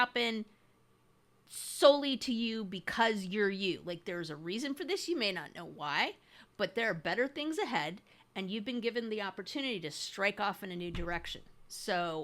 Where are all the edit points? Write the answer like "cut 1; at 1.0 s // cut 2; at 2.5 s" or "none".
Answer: none